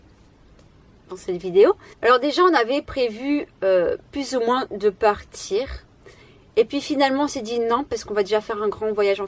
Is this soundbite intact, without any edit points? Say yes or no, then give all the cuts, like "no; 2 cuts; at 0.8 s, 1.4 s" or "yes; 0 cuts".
yes; 0 cuts